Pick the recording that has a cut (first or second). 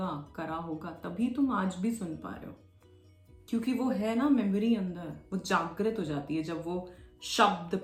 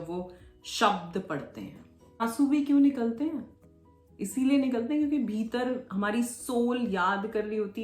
second